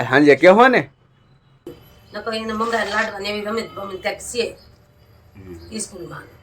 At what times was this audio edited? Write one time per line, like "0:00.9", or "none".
0:01.6